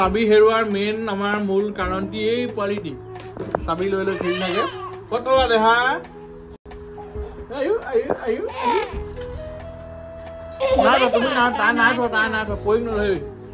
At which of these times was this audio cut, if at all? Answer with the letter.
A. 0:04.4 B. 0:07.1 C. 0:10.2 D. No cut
D